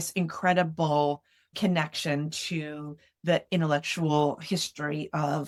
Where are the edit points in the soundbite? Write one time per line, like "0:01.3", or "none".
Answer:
none